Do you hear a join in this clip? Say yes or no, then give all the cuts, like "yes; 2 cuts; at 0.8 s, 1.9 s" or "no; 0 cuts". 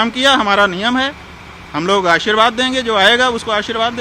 no; 0 cuts